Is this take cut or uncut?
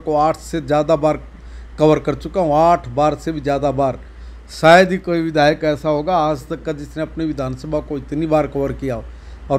uncut